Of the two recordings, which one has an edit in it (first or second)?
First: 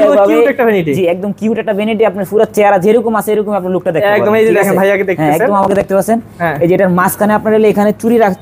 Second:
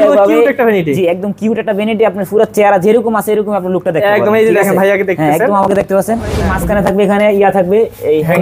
second